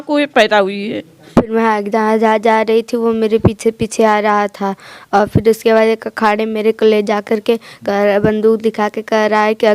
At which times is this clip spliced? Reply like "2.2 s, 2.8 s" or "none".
1.2 s